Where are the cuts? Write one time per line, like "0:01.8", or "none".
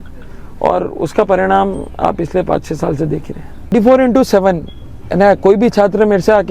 0:03.7